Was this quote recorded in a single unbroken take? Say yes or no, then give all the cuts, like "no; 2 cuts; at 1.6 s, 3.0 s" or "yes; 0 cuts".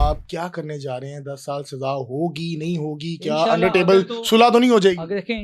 yes; 0 cuts